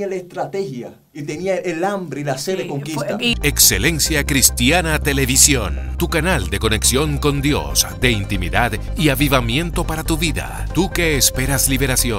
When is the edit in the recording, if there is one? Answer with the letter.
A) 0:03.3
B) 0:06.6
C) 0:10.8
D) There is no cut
A